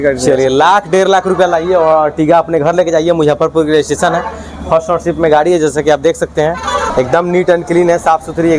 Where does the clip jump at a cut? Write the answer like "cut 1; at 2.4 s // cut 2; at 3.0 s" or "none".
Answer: none